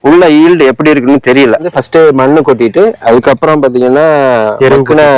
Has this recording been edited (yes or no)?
yes